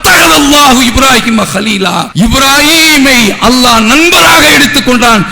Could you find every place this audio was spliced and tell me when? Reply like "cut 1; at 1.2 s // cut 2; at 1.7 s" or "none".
cut 1; at 2.1 s